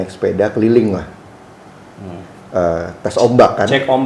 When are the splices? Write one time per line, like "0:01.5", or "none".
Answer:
none